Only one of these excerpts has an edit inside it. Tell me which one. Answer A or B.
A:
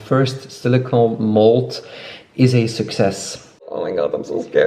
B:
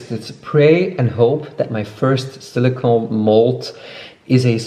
A